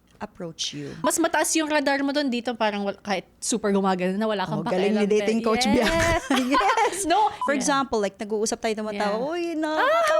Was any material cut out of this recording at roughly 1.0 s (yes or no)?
yes